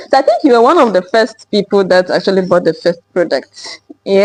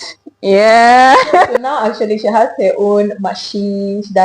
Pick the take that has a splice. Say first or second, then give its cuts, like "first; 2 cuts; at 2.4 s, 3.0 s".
second; 1 cut; at 1.5 s